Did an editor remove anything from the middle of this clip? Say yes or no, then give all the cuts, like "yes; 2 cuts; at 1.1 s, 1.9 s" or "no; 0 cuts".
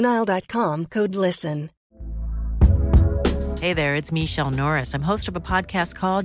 yes; 1 cut; at 1.8 s